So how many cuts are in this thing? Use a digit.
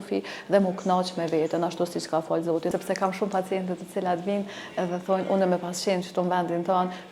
1